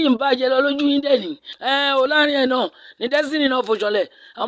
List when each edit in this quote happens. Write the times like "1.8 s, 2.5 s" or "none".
1.4 s